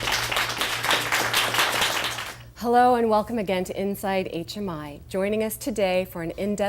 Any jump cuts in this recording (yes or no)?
yes